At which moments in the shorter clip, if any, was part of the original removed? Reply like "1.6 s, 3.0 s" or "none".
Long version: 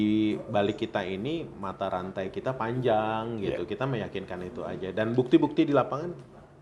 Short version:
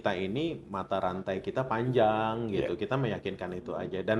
none